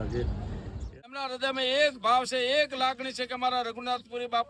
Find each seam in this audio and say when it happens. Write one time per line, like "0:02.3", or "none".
0:01.1